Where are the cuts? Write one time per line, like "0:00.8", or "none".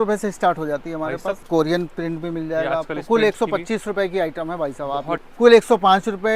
0:01.4
0:05.3